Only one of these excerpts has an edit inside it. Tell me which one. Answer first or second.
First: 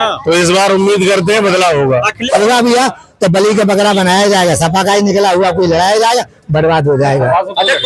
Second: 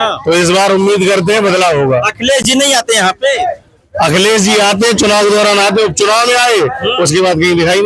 first